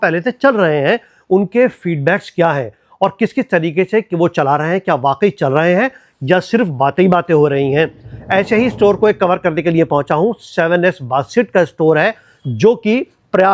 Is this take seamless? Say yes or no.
yes